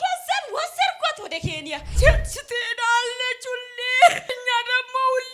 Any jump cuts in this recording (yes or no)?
yes